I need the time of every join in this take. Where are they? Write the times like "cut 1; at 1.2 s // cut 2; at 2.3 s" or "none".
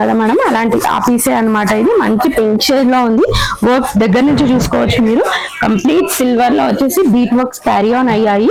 none